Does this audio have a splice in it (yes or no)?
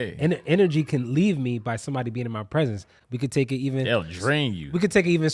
no